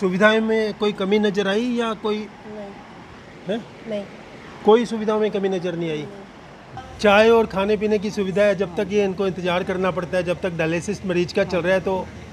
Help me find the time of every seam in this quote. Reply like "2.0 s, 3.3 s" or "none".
6.6 s